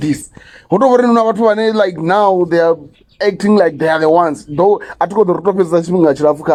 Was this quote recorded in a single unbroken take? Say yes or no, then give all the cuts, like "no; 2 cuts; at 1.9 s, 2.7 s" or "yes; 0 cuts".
yes; 0 cuts